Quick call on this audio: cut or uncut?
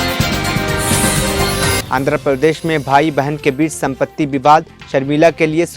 cut